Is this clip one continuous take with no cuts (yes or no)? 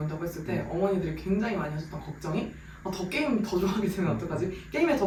yes